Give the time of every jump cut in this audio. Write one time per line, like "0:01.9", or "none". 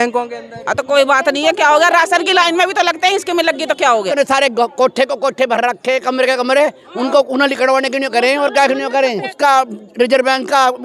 0:04.1
0:09.3